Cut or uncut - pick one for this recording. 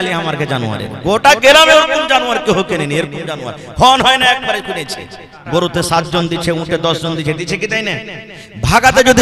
cut